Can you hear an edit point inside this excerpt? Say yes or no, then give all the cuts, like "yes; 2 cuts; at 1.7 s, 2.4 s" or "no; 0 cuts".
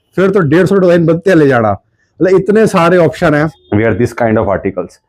yes; 1 cut; at 3.6 s